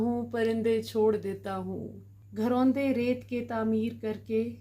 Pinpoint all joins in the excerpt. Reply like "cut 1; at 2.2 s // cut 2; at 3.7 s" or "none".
cut 1; at 2.3 s